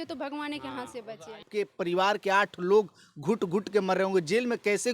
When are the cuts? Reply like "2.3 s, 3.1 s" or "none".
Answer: 1.5 s